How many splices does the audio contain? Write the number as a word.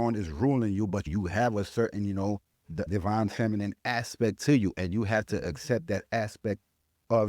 two